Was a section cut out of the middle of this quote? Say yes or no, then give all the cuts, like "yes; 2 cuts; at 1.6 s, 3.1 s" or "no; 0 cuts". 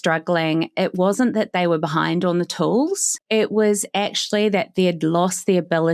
yes; 1 cut; at 3.1 s